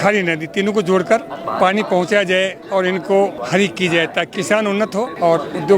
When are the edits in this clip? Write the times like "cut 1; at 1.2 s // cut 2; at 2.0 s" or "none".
cut 1; at 1.4 s // cut 2; at 3.4 s // cut 3; at 4.8 s